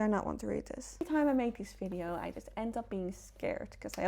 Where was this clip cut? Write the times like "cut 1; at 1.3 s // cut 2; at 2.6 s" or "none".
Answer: cut 1; at 1.0 s